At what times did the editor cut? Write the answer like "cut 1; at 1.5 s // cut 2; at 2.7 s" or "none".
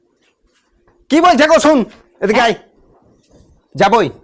none